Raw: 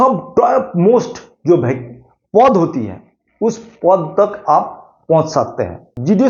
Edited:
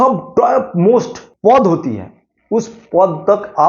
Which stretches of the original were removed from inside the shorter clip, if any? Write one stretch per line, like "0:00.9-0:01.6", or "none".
0:01.2-0:02.1